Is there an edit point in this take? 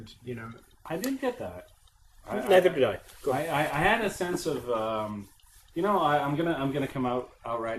yes; 1 cut; at 2.7 s

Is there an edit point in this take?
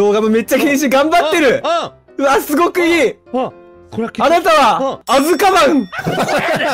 yes; 2 cuts; at 5.0 s, 6.0 s

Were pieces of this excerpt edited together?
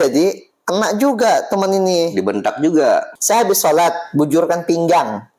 yes; 1 cut; at 3.1 s

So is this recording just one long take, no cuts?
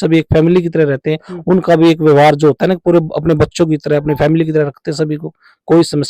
yes; 0 cuts

